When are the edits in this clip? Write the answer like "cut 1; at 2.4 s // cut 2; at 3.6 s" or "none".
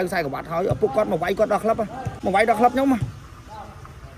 cut 1; at 2.1 s

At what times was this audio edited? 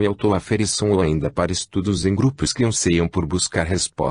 cut 1; at 1.0 s

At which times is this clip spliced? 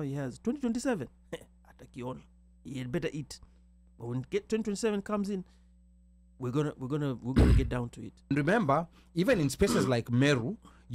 cut 1; at 8.3 s

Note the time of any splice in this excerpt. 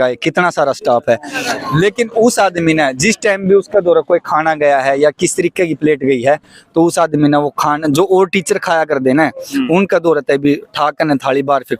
none

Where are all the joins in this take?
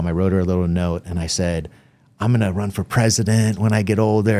none

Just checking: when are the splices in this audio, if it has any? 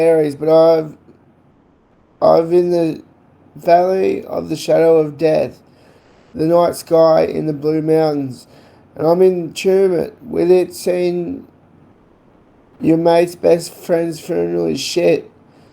cut 1; at 9.7 s

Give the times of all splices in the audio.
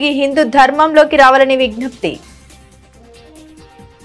cut 1; at 2.5 s

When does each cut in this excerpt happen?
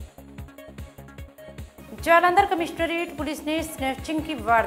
cut 1; at 1.9 s

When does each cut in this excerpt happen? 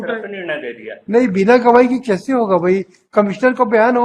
none

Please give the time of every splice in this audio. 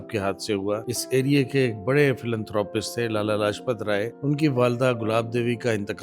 cut 1; at 0.9 s // cut 2; at 4.1 s

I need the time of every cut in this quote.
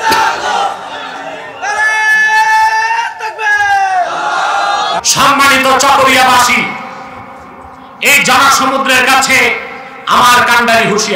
cut 1; at 5.0 s

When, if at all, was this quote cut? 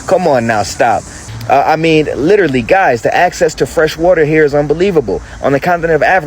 cut 1; at 1.2 s

